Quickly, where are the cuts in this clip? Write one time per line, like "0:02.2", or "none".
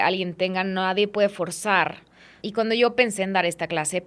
0:02.4